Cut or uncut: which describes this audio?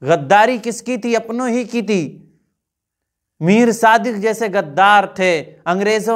uncut